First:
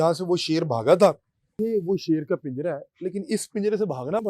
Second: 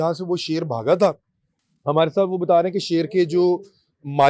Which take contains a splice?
first; 1 cut; at 1.5 s

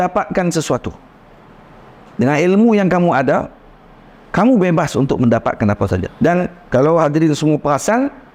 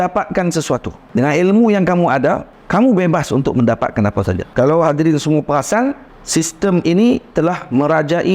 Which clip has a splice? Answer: second; 4 cuts; at 1.0 s, 2.5 s, 4.4 s, 6.1 s

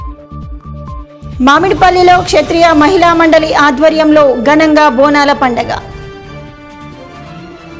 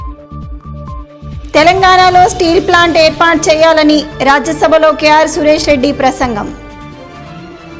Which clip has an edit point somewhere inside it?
second; 1 cut; at 1.0 s

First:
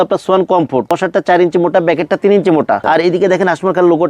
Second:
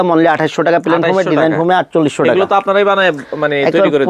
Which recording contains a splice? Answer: first; 2 cuts; at 0.9 s, 2.8 s

